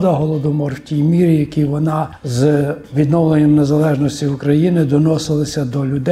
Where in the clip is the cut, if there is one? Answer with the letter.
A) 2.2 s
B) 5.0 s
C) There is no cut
A